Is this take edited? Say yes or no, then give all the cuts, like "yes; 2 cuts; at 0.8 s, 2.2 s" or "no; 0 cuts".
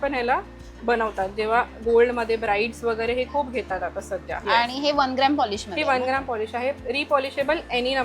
yes; 1 cut; at 4.3 s